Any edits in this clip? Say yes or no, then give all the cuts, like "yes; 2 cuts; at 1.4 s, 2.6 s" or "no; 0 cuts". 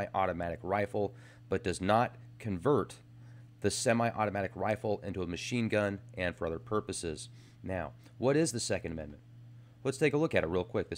yes; 1 cut; at 7.8 s